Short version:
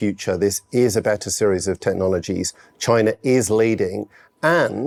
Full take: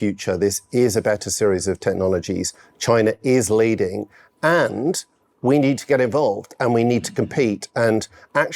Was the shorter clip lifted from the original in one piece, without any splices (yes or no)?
yes